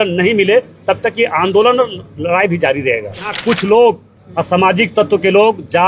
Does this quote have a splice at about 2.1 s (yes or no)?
no